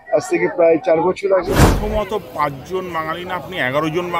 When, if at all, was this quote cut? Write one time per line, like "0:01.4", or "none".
0:01.7